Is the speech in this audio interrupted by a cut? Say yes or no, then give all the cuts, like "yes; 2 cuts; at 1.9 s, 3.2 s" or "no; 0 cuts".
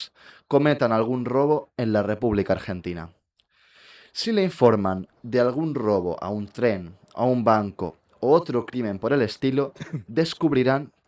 no; 0 cuts